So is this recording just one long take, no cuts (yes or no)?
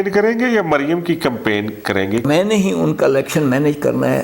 no